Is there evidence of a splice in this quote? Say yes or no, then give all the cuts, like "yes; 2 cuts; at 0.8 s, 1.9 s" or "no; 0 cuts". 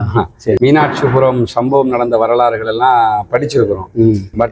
no; 0 cuts